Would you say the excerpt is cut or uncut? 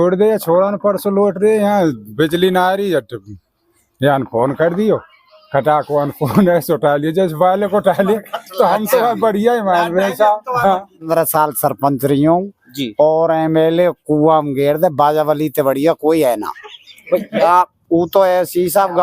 cut